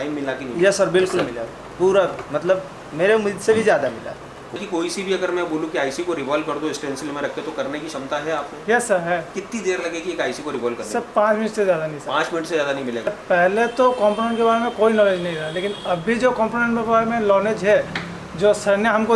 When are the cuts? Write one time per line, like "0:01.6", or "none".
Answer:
0:04.6
0:13.2